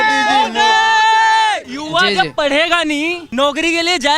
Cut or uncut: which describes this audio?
cut